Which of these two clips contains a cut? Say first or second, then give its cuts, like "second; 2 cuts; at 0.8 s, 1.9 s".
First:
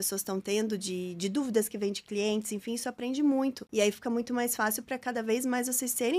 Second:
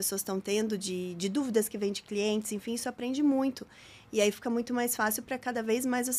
first; 1 cut; at 3.6 s